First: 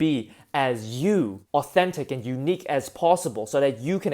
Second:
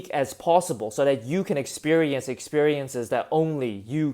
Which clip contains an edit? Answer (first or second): first